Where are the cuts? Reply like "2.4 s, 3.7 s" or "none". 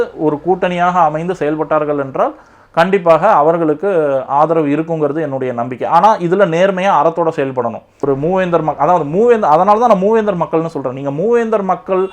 8.0 s